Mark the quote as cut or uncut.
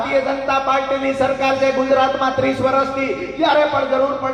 uncut